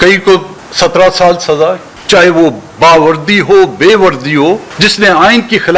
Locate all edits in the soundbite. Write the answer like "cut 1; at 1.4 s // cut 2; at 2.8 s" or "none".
cut 1; at 1.9 s